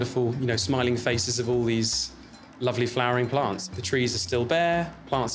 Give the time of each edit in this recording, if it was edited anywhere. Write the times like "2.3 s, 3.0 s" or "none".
4.2 s